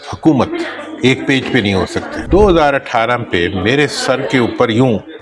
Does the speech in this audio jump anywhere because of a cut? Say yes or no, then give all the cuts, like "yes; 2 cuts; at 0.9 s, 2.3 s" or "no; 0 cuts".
yes; 1 cut; at 2.2 s